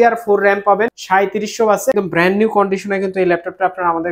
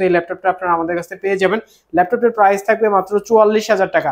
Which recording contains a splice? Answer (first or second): first